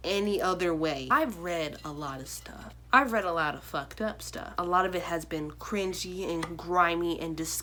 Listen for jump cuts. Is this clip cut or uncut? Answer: uncut